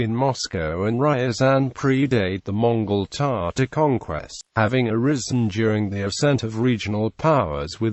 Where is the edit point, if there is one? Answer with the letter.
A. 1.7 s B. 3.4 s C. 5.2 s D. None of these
A